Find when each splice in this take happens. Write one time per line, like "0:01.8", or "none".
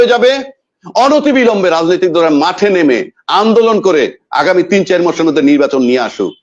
none

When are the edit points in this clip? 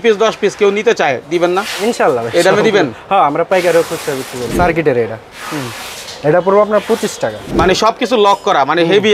0:04.4
0:07.4

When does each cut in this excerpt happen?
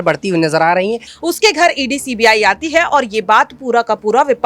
0:01.1

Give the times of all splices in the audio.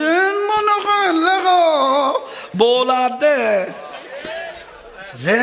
none

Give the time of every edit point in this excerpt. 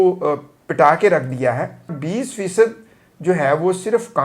0:02.0

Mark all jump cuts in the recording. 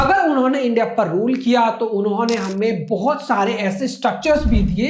none

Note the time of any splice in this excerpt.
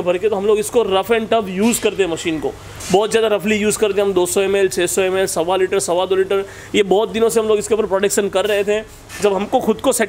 none

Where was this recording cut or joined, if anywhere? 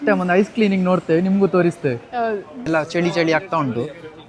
0:02.7

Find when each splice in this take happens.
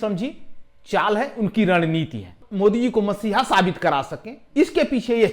0:02.4

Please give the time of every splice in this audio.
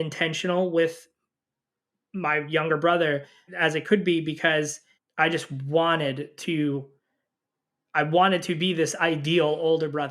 0:03.5

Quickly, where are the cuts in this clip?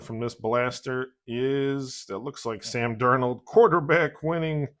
none

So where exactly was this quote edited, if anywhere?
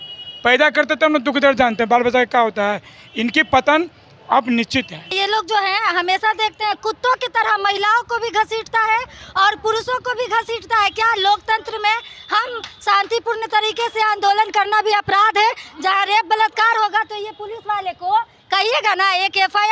0:05.1

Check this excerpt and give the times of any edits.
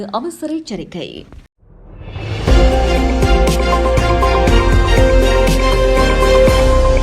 0:01.2

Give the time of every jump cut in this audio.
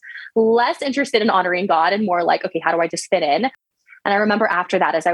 0:03.7

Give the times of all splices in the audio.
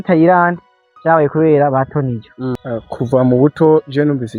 0:02.5

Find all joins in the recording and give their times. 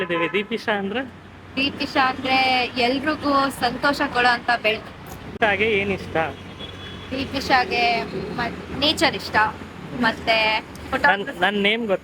0:05.4

